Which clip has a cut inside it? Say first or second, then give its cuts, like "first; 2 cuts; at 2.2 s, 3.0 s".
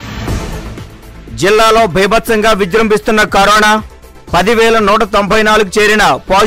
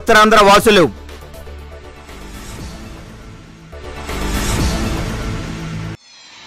first; 1 cut; at 1.0 s